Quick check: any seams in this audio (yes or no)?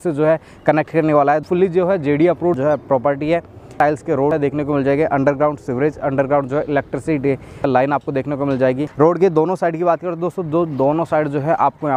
yes